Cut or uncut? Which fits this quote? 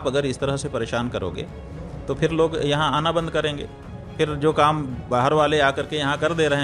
uncut